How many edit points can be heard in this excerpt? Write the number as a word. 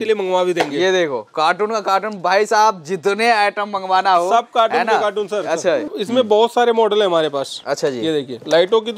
one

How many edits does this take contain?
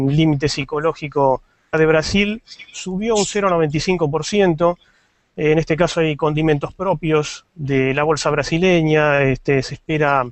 zero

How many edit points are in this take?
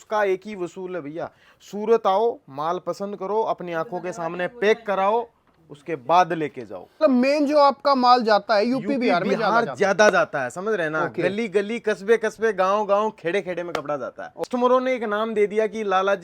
two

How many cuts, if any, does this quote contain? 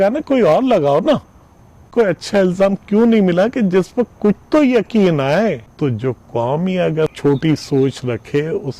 three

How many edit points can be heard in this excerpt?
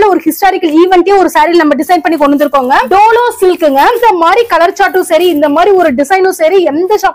two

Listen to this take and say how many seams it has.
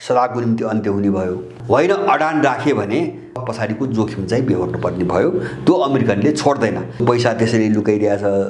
three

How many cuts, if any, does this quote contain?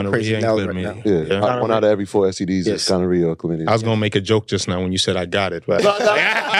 zero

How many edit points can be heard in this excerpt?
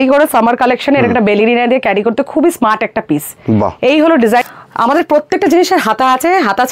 one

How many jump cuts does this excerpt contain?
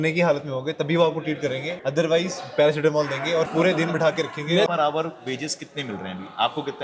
three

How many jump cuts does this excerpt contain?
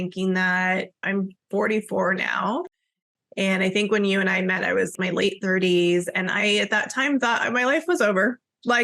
two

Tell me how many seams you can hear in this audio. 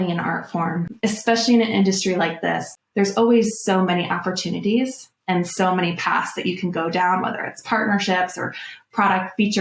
two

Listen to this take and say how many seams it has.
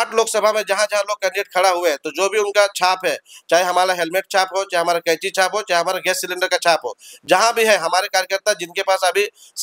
zero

